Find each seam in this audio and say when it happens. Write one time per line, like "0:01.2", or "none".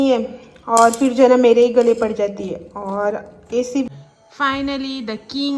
0:03.9